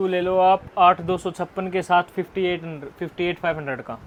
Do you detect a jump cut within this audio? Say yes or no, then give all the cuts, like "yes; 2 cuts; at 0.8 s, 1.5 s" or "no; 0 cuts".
no; 0 cuts